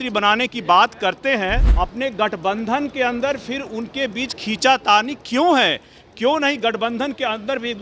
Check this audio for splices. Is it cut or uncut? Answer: cut